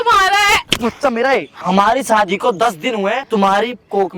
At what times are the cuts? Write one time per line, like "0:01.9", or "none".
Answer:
0:01.6
0:03.3